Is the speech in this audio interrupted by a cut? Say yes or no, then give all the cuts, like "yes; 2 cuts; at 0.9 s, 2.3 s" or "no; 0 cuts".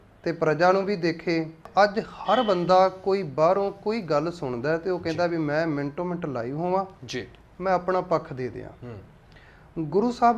yes; 1 cut; at 1.7 s